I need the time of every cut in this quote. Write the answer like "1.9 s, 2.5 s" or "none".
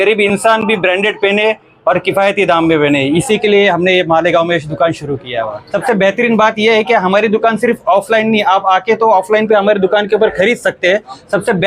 none